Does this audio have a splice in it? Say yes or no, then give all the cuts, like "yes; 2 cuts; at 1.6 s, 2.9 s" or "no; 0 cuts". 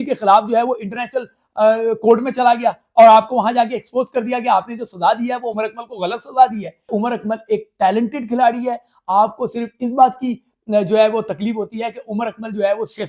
yes; 1 cut; at 6.9 s